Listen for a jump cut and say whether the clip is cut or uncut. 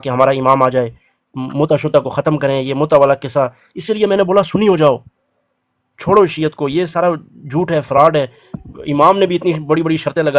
uncut